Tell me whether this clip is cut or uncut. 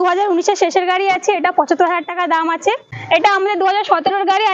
cut